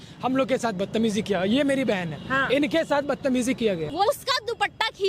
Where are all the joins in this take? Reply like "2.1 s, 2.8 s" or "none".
4.0 s